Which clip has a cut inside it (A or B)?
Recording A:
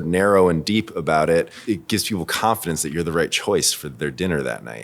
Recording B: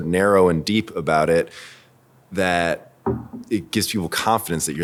A